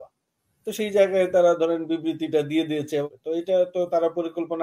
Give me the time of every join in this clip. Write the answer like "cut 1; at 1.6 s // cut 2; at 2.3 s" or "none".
cut 1; at 3.1 s